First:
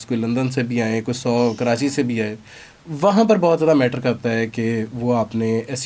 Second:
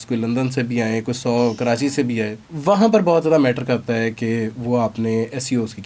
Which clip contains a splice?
second; 1 cut; at 2.4 s

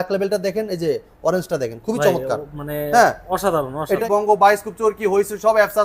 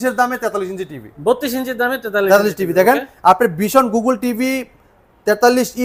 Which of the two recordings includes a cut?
first; 1 cut; at 4.0 s

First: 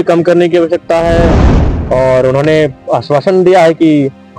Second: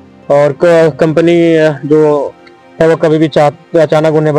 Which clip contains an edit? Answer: first; 1 cut; at 1.5 s

